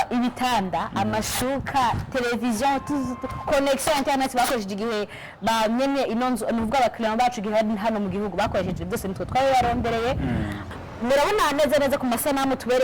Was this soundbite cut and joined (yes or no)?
yes